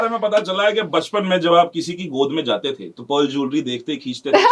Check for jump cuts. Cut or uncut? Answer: uncut